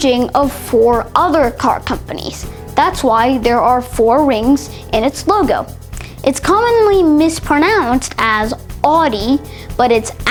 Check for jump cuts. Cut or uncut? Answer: uncut